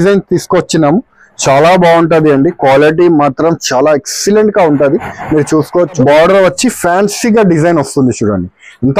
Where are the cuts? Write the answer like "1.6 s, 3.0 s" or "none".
6.0 s